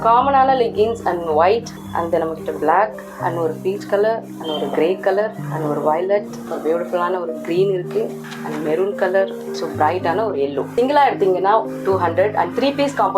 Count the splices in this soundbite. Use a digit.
8